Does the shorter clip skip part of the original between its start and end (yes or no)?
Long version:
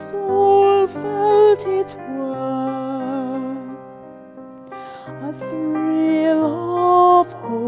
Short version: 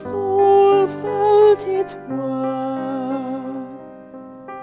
yes